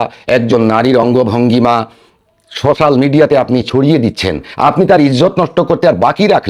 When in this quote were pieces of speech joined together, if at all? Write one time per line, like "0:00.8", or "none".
none